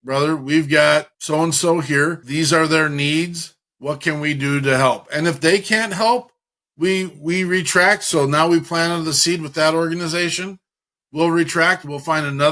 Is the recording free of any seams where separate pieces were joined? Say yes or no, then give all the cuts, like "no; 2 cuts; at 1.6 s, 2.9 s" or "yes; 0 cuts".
no; 2 cuts; at 1.2 s, 2.2 s